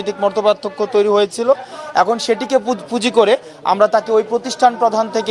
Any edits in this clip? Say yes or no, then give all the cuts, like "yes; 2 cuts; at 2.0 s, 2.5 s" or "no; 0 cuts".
no; 0 cuts